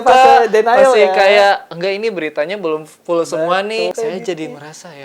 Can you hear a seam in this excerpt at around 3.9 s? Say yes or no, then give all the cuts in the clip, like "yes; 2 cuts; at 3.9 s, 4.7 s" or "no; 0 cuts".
yes; 1 cut; at 3.9 s